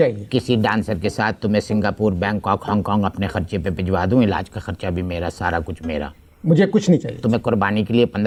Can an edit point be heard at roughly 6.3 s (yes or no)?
no